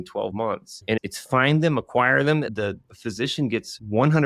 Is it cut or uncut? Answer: cut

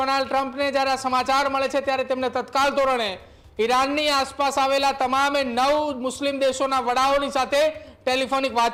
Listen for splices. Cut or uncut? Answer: uncut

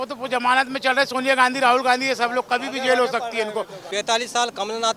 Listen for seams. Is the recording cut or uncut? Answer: cut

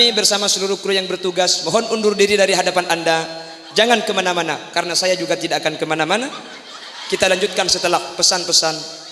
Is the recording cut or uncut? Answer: uncut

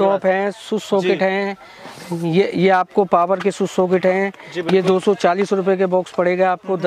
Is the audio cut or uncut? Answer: uncut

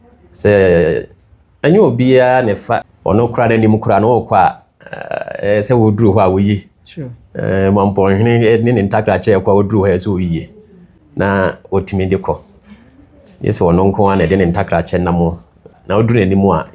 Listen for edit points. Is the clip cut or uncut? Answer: cut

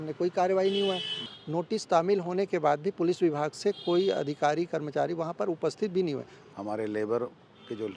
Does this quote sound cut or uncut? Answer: cut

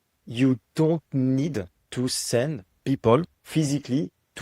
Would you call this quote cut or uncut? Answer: cut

